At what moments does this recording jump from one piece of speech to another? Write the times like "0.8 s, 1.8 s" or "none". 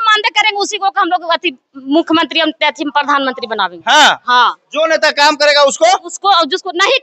none